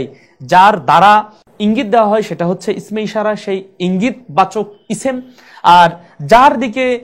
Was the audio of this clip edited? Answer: no; 0 cuts

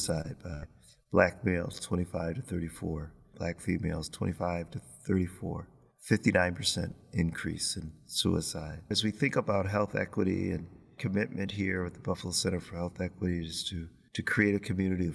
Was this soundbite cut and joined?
yes; 2 cuts; at 3.3 s, 9.0 s

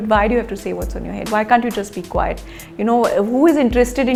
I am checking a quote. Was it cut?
no; 0 cuts

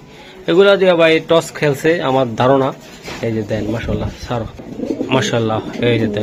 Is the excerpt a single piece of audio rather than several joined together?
yes; 0 cuts

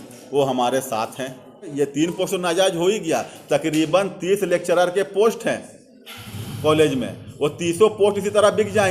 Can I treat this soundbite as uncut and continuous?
no; 1 cut; at 1.7 s

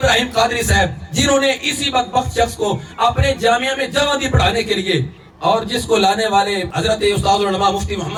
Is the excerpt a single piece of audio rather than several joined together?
yes; 0 cuts

